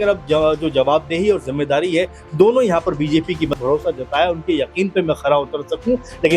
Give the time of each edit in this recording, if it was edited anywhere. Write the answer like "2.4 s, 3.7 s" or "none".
3.6 s